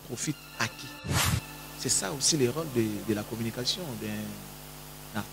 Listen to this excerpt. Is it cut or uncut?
cut